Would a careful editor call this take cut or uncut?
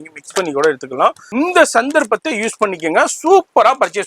cut